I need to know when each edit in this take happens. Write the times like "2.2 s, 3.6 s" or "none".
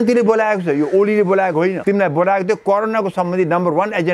1.8 s